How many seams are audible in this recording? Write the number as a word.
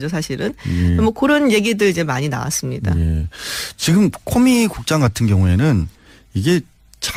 zero